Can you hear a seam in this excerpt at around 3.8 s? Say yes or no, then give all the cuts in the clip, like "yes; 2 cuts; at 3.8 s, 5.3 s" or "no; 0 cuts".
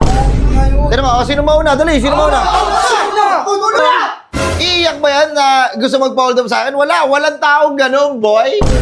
yes; 1 cut; at 3.8 s